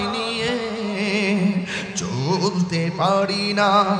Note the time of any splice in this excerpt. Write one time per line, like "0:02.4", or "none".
none